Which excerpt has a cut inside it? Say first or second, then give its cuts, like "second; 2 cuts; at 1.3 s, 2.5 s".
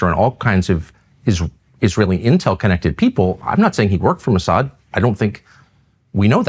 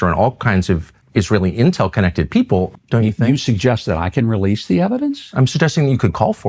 second; 2 cuts; at 1.0 s, 2.7 s